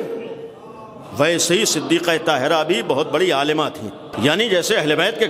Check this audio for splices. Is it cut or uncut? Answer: cut